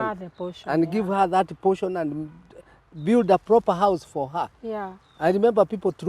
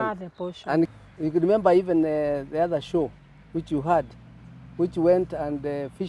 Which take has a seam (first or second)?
second